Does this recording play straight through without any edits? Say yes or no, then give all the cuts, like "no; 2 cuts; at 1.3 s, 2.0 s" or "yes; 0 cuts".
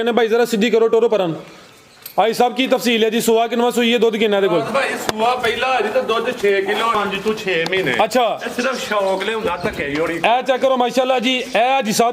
no; 1 cut; at 6.9 s